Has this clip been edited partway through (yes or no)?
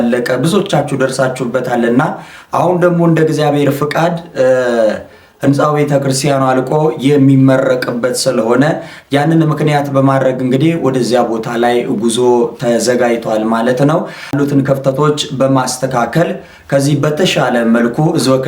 yes